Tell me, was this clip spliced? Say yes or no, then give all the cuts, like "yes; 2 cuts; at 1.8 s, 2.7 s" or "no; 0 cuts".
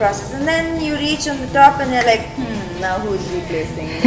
no; 0 cuts